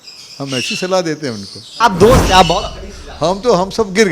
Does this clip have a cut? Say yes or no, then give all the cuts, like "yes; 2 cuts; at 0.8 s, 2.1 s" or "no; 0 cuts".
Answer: yes; 1 cut; at 1.6 s